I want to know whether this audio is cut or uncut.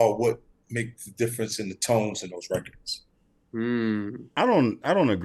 cut